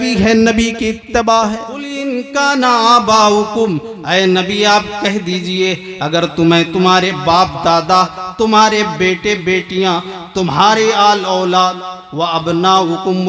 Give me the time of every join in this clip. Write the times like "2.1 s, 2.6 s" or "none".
2.0 s